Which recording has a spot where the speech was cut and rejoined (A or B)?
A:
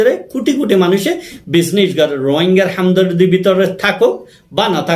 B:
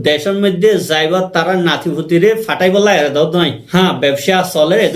B